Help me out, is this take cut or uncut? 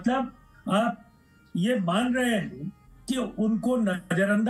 uncut